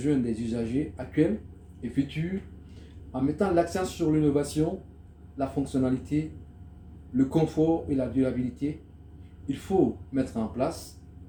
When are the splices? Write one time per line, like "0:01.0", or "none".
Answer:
none

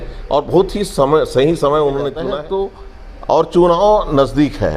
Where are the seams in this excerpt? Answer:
0:02.3

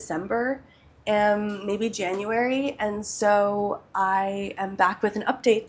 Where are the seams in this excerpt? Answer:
none

